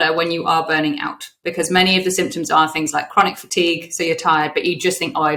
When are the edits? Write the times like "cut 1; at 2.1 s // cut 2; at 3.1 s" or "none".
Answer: none